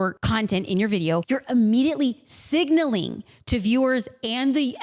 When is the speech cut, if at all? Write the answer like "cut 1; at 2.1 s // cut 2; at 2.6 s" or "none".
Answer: cut 1; at 1.2 s